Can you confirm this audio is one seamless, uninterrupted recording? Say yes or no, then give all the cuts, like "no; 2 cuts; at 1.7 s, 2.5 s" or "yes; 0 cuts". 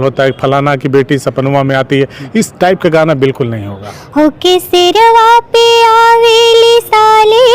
no; 1 cut; at 3.9 s